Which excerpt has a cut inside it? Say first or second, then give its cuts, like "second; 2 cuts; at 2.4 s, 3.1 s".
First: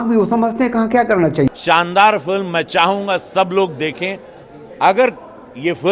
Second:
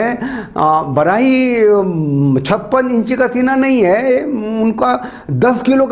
first; 1 cut; at 1.5 s